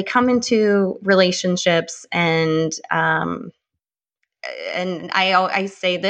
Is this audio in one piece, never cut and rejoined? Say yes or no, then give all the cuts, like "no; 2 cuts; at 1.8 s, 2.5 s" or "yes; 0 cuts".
yes; 0 cuts